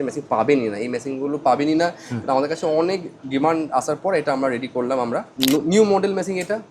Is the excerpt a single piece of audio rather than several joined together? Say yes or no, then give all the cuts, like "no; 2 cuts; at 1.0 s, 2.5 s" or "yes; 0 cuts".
no; 1 cut; at 5.3 s